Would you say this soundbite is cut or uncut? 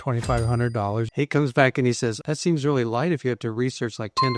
cut